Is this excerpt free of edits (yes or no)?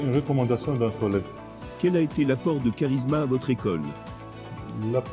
yes